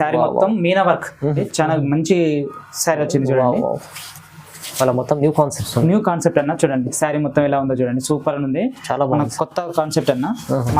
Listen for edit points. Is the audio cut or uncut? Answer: cut